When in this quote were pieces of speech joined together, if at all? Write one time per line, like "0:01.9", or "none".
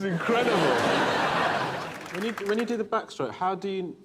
0:02.0